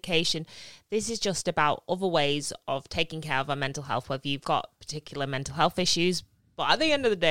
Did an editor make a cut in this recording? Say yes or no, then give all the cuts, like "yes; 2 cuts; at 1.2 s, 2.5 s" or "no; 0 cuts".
no; 0 cuts